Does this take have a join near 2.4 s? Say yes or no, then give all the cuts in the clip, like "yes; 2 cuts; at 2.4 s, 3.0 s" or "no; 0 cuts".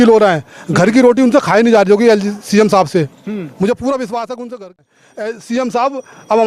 no; 1 cut; at 4.8 s